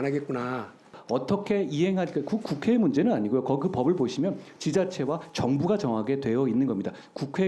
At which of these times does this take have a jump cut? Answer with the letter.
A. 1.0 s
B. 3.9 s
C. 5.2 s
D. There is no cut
A